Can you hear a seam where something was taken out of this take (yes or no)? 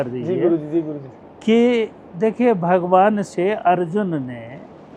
no